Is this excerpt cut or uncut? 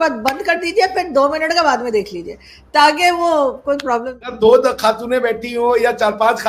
cut